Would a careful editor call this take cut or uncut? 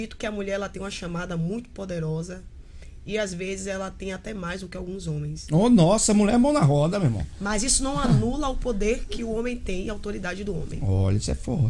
uncut